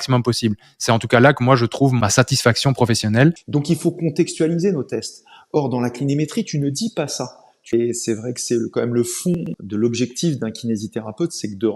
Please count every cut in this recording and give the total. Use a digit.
4